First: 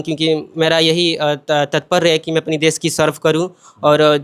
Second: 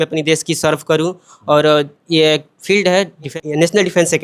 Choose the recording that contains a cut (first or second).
second